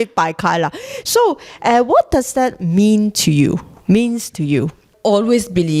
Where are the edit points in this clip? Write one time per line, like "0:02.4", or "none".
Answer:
0:04.9